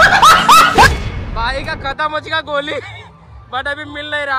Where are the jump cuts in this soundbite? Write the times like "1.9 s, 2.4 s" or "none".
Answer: 1.1 s